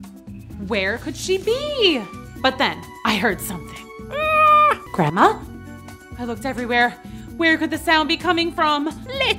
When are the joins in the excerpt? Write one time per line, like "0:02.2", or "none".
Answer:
0:04.8